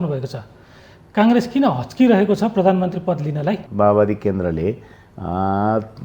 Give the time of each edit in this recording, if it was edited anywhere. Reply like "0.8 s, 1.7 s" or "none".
3.7 s